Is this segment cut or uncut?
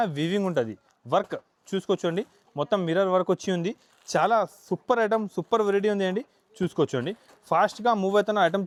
uncut